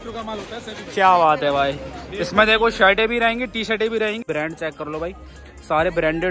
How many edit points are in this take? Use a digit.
1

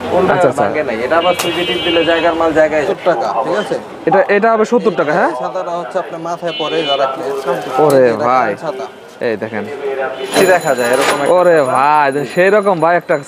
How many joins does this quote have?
3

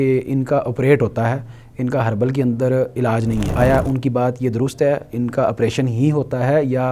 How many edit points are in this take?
1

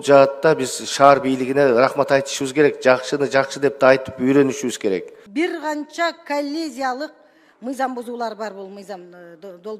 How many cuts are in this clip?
1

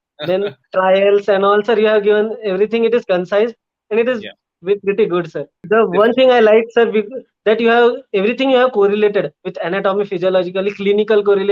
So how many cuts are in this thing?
1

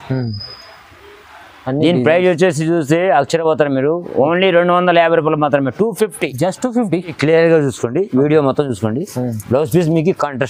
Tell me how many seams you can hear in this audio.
1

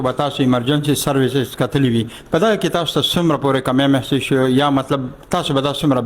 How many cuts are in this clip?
0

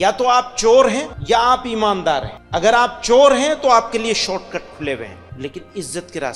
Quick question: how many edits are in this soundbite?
3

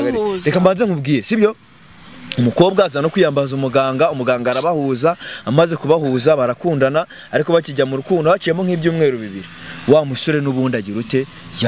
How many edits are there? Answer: 0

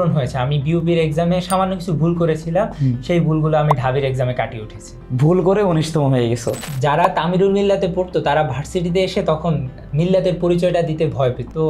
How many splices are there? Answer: 1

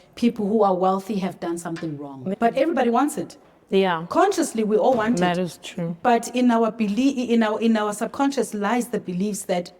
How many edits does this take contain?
1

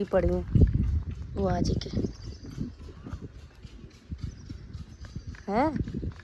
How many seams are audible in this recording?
0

